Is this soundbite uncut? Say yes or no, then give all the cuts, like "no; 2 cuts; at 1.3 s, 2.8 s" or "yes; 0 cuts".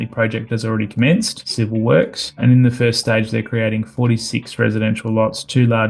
no; 2 cuts; at 1.4 s, 2.2 s